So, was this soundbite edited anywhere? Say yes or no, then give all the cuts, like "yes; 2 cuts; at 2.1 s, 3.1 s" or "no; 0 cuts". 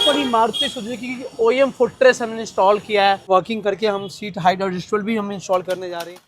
yes; 1 cut; at 3.2 s